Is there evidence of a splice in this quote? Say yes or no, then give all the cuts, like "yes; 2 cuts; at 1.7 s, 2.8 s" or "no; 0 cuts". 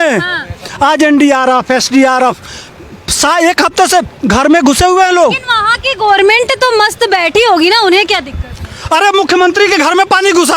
no; 0 cuts